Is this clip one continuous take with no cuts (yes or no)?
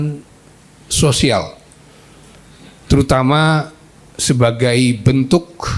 yes